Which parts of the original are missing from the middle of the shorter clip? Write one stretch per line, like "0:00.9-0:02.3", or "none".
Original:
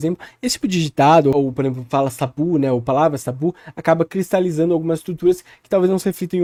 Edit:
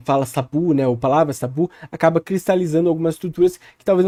none